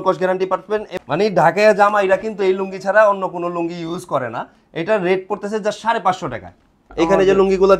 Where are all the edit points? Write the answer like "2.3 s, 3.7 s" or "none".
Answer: 0.9 s, 6.9 s